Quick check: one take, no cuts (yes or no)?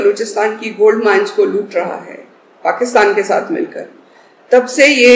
yes